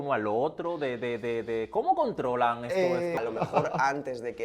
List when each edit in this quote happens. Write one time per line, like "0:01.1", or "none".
0:03.2